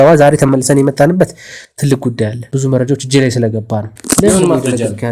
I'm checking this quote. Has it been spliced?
yes; 2 cuts; at 2.4 s, 3.9 s

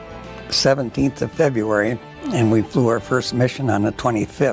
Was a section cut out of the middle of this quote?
no; 0 cuts

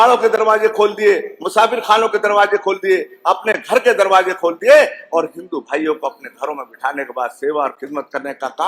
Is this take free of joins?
yes; 0 cuts

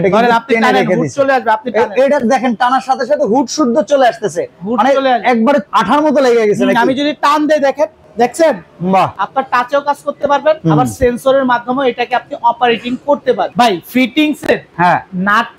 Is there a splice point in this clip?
yes; 6 cuts; at 5.7 s, 8.0 s, 9.2 s, 10.6 s, 13.5 s, 14.7 s

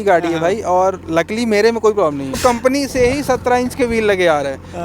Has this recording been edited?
yes; 1 cut; at 2.4 s

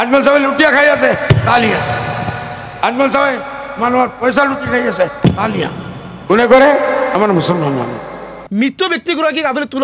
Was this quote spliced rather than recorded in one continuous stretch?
yes; 1 cut; at 8.4 s

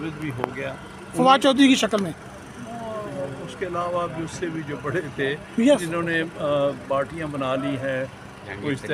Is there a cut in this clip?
no; 0 cuts

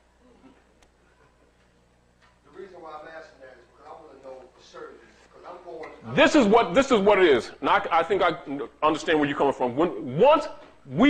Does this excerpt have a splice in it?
no; 0 cuts

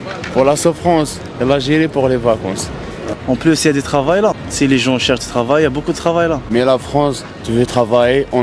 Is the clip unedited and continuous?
no; 3 cuts; at 3.0 s, 4.4 s, 6.4 s

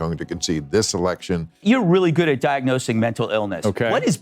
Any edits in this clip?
yes; 1 cut; at 1.6 s

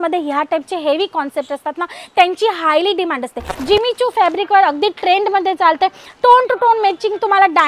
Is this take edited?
yes; 1 cut; at 3.5 s

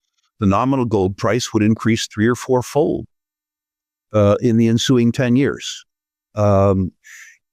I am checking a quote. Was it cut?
no; 0 cuts

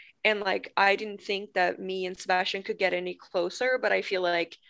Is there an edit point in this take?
no; 0 cuts

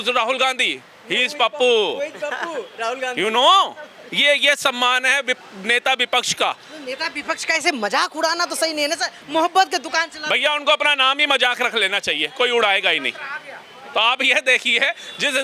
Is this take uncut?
yes; 0 cuts

